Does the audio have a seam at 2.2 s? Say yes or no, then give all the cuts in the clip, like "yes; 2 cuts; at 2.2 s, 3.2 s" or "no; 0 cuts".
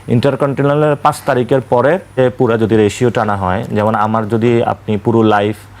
yes; 1 cut; at 2.2 s